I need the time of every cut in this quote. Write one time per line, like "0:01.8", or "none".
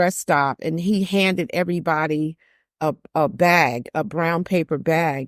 none